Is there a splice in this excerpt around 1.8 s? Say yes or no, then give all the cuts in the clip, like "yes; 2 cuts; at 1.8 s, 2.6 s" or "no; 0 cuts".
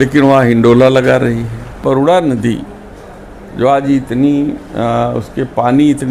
yes; 1 cut; at 1.8 s